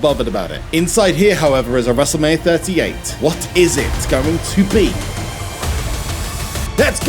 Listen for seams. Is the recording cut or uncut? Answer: cut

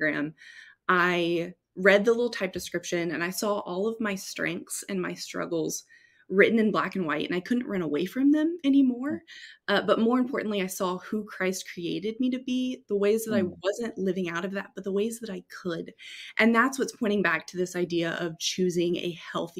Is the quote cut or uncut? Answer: uncut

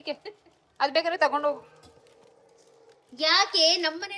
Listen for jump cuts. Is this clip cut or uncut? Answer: uncut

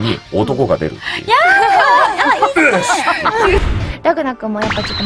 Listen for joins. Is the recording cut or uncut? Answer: cut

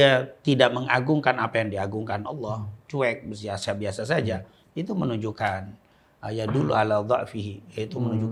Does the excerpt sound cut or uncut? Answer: uncut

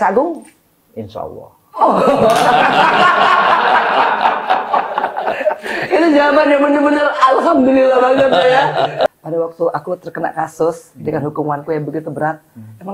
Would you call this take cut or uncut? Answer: cut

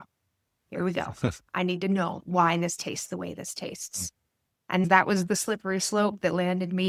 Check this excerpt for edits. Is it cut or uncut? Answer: uncut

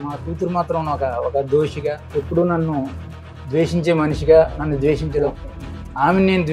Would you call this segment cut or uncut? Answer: cut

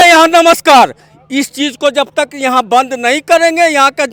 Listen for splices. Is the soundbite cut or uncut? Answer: uncut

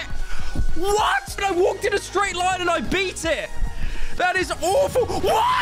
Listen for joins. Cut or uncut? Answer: cut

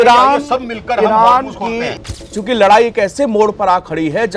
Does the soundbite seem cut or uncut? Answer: cut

